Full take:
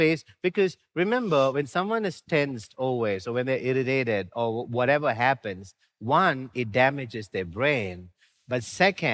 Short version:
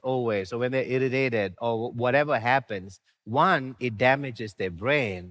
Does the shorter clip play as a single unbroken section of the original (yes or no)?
yes